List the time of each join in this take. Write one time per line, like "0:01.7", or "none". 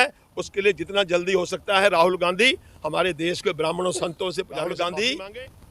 0:04.5